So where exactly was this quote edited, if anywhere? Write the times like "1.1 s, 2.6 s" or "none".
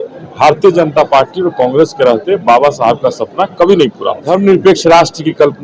4.2 s